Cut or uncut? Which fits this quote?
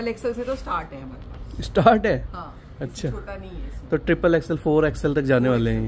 uncut